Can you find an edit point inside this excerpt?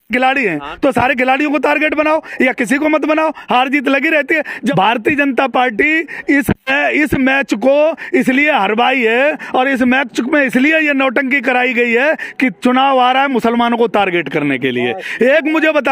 yes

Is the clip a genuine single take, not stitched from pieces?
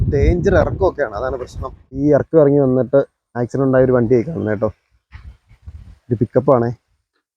no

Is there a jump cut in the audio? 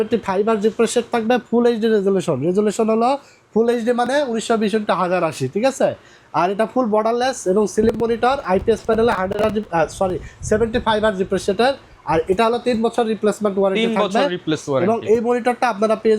no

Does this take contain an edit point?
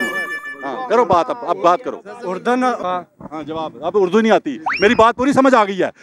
yes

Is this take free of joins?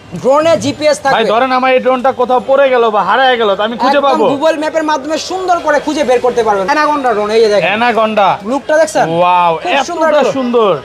no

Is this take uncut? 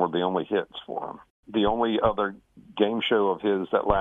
no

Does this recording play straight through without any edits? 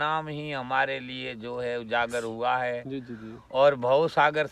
yes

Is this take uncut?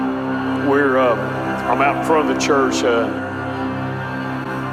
yes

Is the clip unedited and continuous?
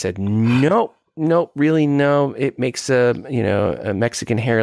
yes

